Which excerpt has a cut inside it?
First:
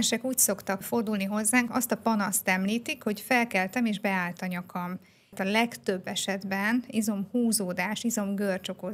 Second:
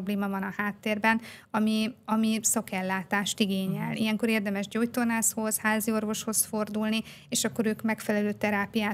first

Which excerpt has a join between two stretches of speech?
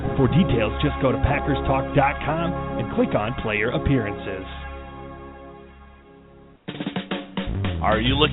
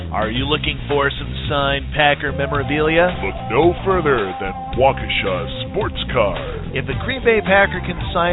first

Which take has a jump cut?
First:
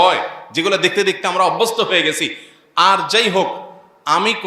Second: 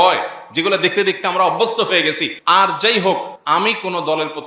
second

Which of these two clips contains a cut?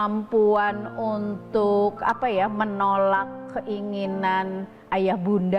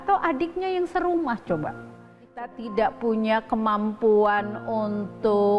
second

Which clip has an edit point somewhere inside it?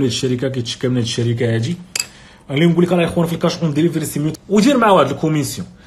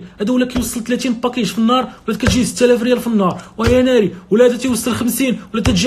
first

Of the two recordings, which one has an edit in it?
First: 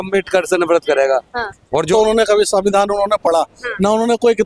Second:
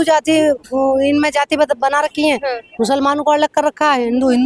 first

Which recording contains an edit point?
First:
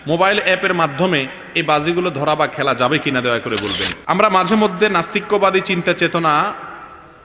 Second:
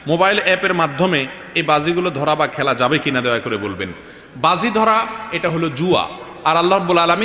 first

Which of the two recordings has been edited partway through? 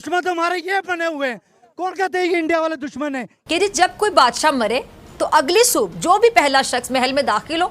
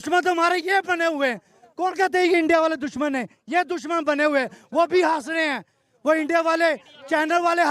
first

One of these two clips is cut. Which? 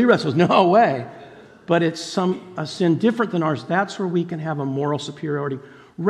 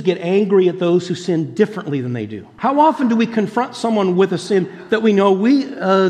second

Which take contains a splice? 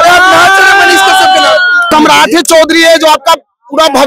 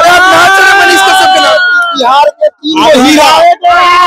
first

